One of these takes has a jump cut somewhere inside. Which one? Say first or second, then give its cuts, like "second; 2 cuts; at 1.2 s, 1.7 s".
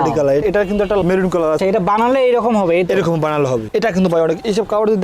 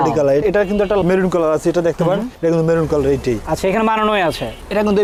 first; 2 cuts; at 1.6 s, 3.6 s